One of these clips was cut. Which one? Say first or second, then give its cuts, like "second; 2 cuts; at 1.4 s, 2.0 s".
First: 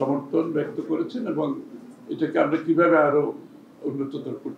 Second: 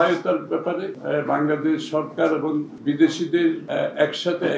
second; 3 cuts; at 0.9 s, 2.7 s, 3.6 s